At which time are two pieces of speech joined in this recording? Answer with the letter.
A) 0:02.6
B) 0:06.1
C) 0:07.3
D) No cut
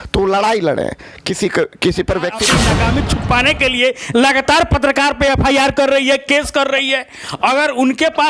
A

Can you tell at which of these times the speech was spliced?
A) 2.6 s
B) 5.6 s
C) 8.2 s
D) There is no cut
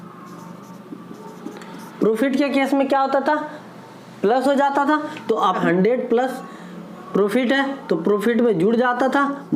B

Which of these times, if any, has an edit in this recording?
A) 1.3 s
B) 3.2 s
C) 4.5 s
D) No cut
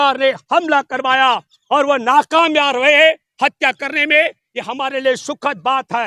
D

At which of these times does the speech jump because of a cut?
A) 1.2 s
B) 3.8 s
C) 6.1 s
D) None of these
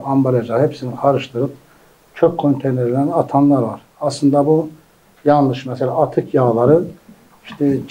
D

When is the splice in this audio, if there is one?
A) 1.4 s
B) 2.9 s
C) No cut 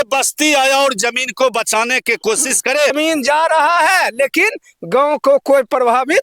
B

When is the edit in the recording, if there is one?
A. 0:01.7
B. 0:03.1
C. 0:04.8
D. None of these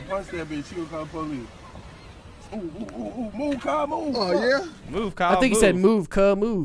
C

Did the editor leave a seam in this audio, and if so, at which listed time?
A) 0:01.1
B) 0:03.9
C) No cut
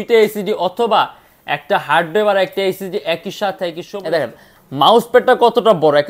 B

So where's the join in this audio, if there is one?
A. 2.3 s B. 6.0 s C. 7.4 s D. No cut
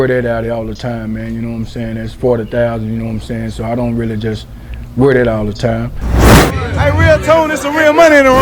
B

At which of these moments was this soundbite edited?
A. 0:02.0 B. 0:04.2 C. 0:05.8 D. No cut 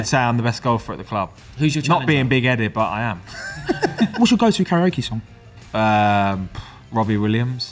B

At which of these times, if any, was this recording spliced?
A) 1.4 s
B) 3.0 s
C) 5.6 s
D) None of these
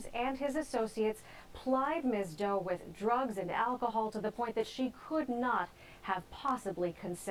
D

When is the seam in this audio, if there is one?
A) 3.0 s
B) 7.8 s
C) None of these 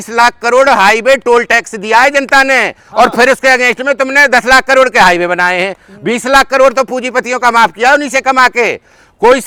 C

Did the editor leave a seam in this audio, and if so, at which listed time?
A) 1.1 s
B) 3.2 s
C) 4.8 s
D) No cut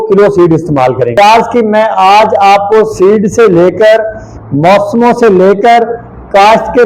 A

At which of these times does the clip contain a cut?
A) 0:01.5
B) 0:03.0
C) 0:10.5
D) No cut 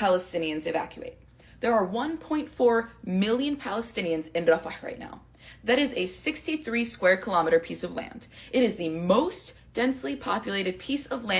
A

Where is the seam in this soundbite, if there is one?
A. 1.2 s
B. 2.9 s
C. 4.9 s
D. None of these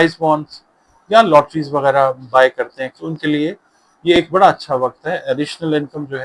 B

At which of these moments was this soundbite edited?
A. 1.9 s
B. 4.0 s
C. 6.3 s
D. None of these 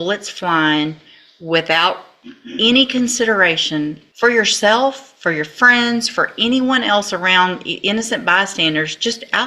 B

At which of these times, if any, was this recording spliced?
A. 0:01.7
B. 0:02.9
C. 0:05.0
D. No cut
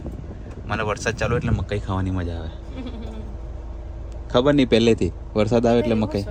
D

